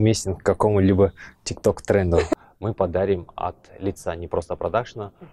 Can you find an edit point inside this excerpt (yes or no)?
yes